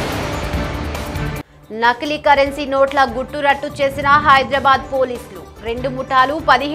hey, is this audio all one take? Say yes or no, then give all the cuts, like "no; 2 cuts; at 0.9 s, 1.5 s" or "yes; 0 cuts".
no; 1 cut; at 1.3 s